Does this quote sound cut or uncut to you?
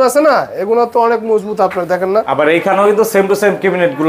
cut